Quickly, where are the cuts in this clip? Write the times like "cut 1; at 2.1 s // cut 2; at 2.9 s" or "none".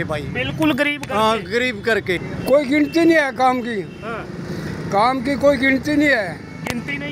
cut 1; at 2.3 s

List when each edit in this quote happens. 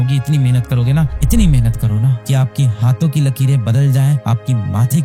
none

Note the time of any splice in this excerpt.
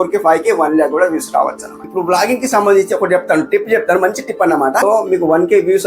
cut 1; at 1.9 s // cut 2; at 4.8 s

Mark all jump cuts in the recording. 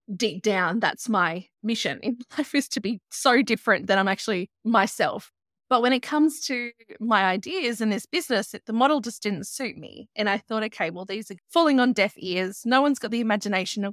cut 1; at 1.5 s // cut 2; at 4.5 s // cut 3; at 5.3 s // cut 4; at 11.3 s

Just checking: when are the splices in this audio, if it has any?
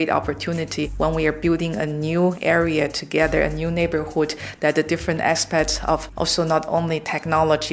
cut 1; at 0.9 s // cut 2; at 6.1 s

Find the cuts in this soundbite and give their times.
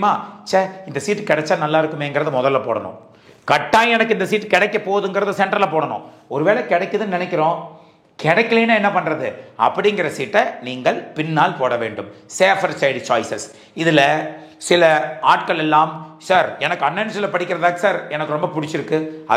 none

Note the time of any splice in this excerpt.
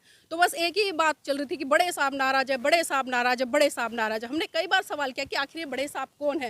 none

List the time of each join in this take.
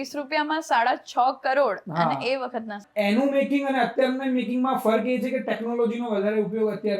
cut 1; at 2.8 s

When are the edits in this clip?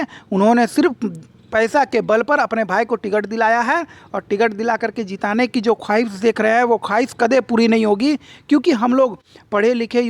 none

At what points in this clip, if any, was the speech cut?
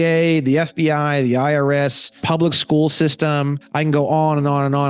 cut 1; at 2.2 s // cut 2; at 3.6 s

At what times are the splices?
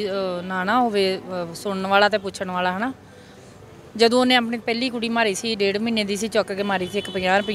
none

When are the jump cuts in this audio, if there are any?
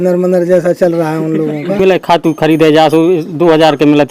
cut 1; at 1.8 s

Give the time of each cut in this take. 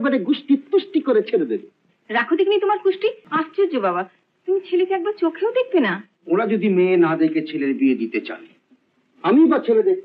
cut 1; at 3.2 s // cut 2; at 6.1 s

